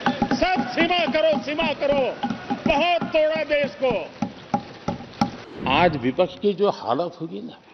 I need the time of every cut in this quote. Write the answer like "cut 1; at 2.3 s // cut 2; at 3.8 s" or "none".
cut 1; at 5.5 s